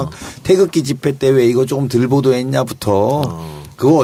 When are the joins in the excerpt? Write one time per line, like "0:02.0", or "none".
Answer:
none